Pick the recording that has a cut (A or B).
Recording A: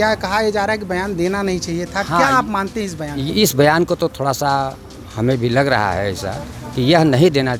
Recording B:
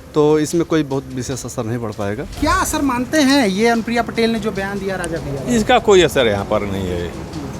B